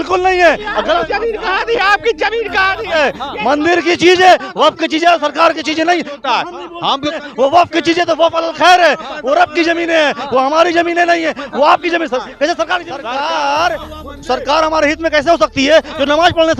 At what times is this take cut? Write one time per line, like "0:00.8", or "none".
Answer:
0:12.9